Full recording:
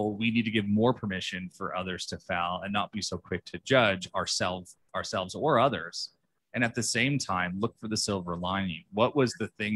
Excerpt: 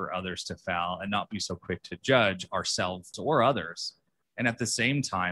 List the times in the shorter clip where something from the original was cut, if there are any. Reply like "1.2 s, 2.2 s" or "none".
3.1 s